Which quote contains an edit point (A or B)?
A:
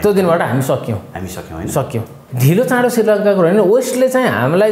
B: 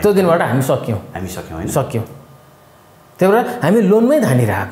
A